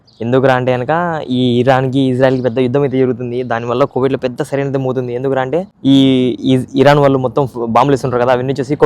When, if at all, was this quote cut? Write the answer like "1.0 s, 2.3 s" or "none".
5.7 s

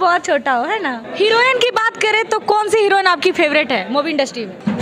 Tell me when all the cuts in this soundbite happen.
1.0 s

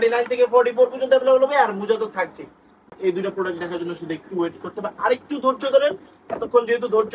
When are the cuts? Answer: 3.0 s

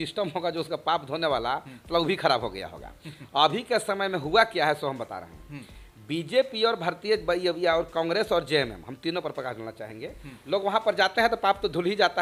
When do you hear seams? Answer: none

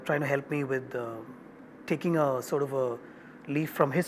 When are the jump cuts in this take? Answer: none

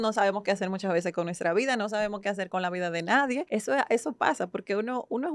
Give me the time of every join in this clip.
3.5 s

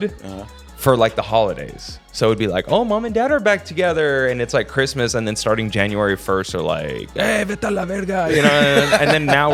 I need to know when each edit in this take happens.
none

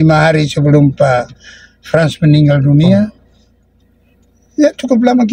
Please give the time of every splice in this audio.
none

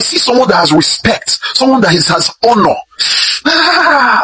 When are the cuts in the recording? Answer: none

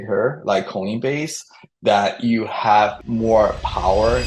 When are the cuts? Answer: 3.0 s

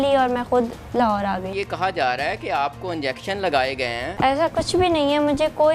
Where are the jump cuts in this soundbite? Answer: 1.6 s, 4.1 s

